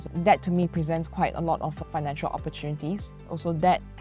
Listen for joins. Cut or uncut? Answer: uncut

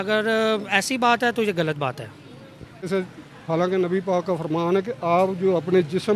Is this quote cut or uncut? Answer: cut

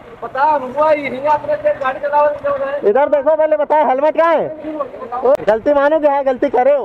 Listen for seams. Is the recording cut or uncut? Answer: cut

